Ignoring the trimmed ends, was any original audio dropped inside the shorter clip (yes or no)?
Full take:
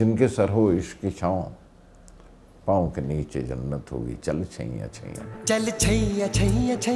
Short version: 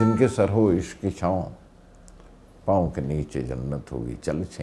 no